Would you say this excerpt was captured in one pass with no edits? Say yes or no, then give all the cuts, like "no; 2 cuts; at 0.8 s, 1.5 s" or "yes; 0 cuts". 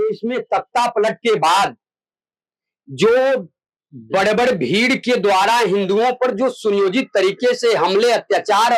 yes; 0 cuts